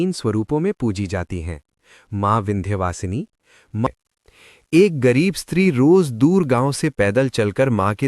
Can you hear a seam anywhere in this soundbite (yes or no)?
yes